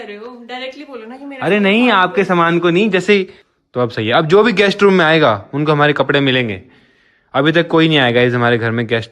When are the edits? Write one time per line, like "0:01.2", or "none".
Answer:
0:03.4

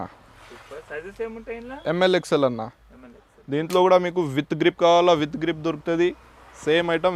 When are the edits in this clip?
none

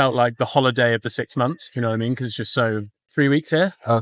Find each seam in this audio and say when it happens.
0:03.0

